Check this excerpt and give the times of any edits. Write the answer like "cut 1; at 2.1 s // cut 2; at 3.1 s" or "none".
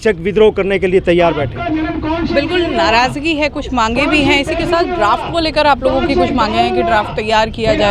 none